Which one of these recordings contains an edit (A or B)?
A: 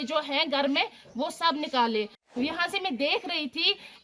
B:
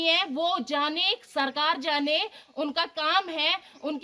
A